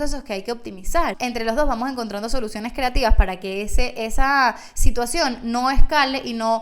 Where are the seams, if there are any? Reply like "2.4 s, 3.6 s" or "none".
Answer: 1.2 s